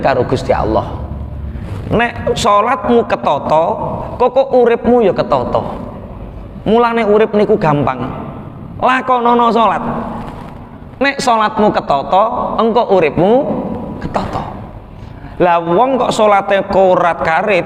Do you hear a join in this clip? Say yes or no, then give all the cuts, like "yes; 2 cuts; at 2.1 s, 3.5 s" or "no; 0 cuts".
no; 0 cuts